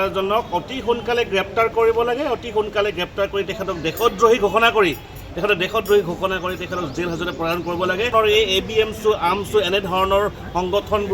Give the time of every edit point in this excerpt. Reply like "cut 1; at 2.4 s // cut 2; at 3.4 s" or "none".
cut 1; at 8.1 s

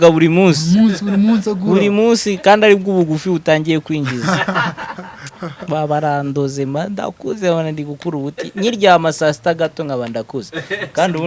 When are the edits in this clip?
none

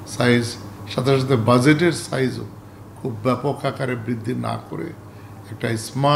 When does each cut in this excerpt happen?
none

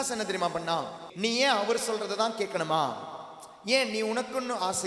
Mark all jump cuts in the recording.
cut 1; at 1.0 s

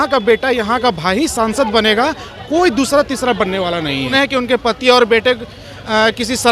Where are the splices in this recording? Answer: cut 1; at 4.1 s

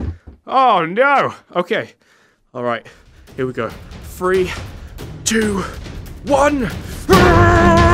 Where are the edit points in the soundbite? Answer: none

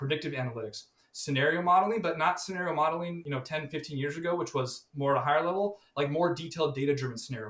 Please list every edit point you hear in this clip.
cut 1; at 3.2 s

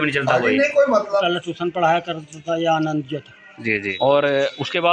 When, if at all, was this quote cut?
cut 1; at 1.2 s // cut 2; at 3.9 s

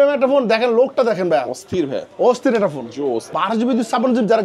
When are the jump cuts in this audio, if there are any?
cut 1; at 3.3 s

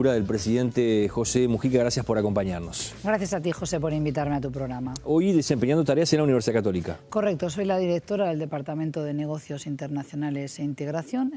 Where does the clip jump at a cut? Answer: cut 1; at 7.2 s

